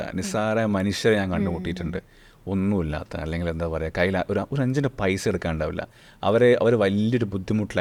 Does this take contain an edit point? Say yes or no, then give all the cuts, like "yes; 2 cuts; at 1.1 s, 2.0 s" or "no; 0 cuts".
no; 0 cuts